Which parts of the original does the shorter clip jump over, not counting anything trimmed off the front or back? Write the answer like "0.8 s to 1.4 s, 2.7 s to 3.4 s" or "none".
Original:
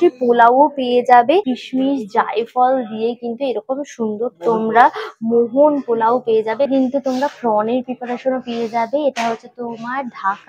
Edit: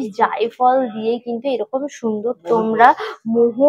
none